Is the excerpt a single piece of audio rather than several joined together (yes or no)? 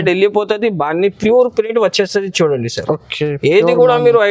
yes